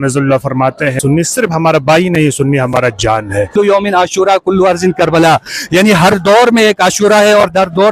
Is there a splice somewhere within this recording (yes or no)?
yes